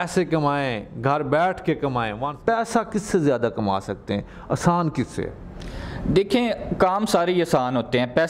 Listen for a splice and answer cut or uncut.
cut